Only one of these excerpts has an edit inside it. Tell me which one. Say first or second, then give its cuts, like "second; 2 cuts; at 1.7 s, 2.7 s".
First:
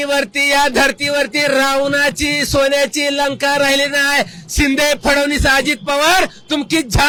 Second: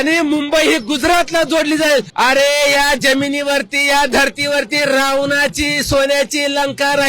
second; 1 cut; at 2.1 s